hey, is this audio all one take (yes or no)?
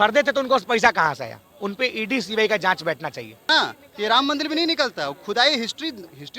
no